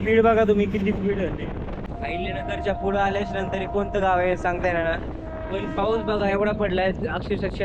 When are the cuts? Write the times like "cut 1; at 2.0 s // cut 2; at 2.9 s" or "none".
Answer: cut 1; at 1.9 s